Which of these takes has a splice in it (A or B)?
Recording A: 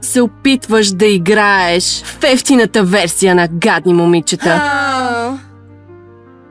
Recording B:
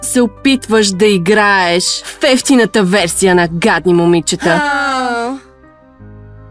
A